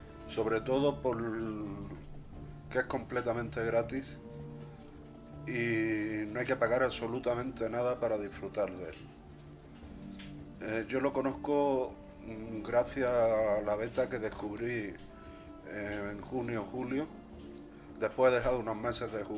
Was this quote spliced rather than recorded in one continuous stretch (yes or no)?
no